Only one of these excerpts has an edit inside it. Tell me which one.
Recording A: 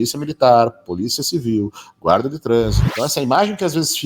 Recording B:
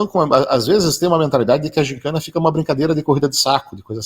A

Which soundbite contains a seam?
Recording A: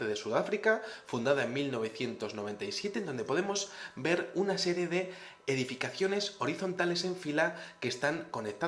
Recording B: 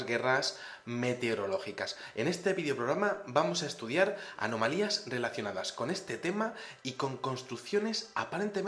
B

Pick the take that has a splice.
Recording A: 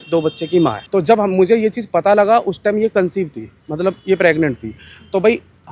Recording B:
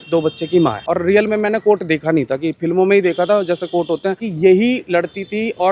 B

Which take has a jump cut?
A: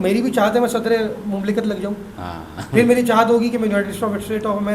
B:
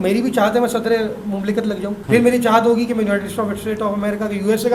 B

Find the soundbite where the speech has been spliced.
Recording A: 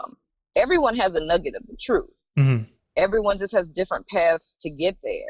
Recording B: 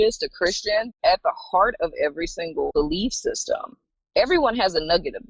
B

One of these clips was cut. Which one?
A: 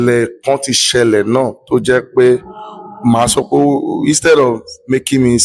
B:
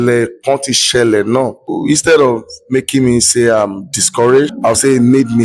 B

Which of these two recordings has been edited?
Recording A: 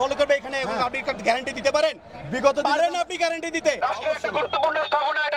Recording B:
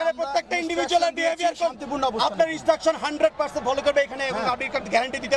A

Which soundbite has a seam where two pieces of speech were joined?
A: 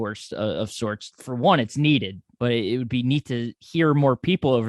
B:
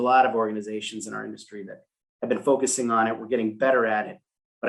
A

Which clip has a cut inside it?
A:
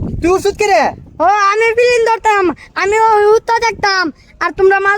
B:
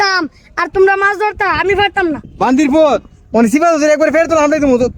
A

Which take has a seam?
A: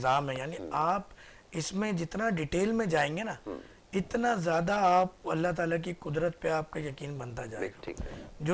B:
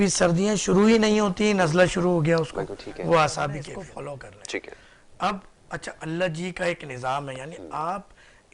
B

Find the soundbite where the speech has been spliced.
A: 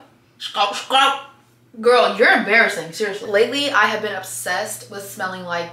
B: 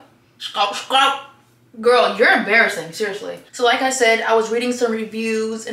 A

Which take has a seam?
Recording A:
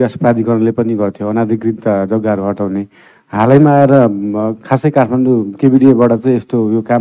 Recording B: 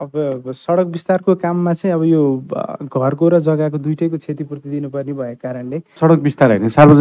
B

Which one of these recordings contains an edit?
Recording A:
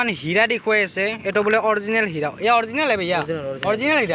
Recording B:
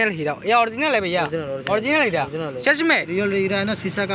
B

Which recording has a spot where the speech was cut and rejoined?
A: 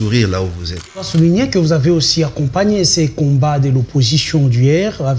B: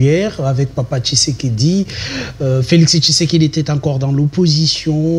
A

